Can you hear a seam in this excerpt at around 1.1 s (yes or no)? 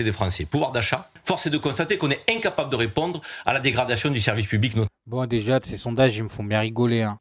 yes